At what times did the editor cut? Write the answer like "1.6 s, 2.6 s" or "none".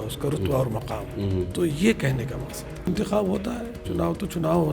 2.9 s